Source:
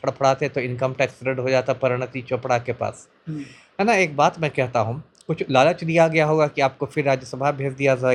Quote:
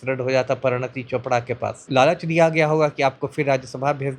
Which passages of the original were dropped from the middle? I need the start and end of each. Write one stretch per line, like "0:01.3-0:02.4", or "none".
0:03.0-0:05.4

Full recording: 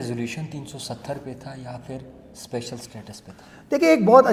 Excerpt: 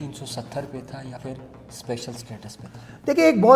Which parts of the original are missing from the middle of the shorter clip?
0:01.7-0:01.8

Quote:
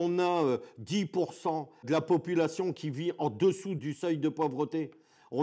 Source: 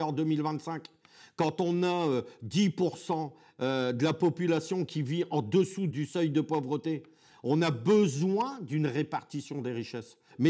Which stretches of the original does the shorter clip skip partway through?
0:03.5-0:04.0

